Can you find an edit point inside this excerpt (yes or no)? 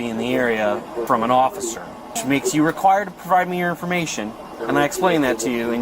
yes